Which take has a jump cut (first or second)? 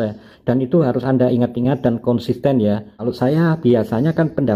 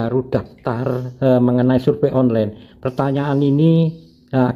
first